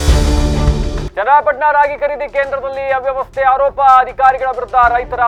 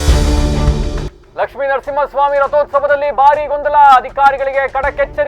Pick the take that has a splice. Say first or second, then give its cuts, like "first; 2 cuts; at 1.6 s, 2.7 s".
second; 1 cut; at 1.1 s